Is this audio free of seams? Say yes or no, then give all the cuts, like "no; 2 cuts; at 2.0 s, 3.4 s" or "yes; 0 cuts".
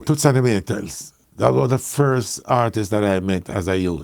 no; 1 cut; at 1.2 s